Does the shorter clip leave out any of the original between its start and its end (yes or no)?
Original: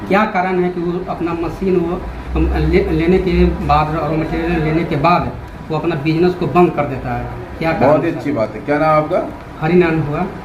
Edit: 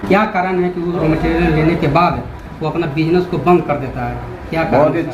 yes